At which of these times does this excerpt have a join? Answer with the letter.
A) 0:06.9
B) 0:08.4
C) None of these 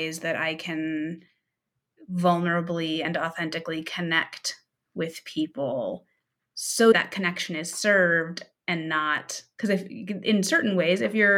A